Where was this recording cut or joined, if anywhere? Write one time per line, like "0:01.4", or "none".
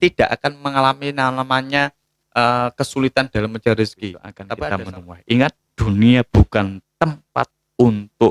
0:04.4

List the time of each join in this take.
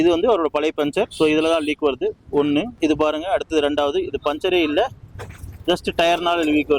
0:01.1
0:02.7

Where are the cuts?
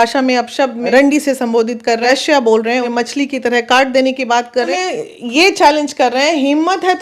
0:00.9
0:02.0
0:02.9
0:04.7

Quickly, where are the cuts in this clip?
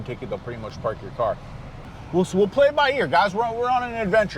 0:02.0

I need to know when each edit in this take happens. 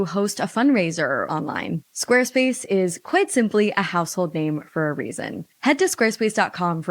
0:01.3

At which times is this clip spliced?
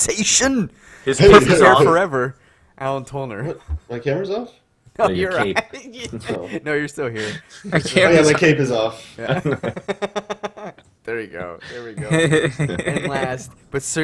0:08.0

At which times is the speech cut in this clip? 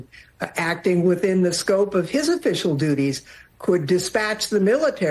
none

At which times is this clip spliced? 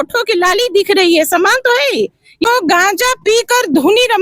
0:02.5

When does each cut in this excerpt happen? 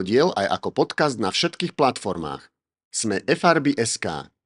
none

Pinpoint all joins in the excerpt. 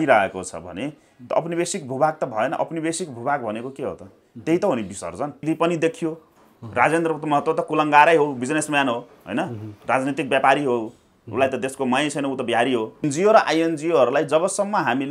0:05.4
0:13.0

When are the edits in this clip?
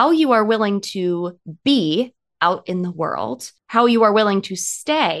0:03.5

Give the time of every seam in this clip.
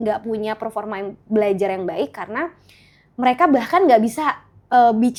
none

